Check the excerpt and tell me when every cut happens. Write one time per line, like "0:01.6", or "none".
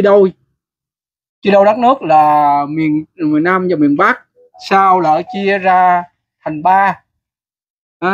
none

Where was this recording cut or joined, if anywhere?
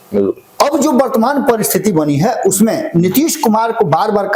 none

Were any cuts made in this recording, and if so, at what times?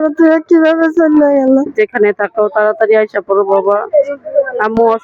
0:01.7

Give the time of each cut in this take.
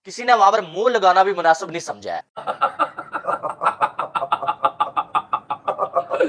0:02.4

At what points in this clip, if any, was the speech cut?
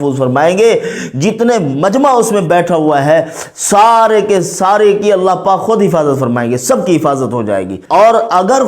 0:07.8

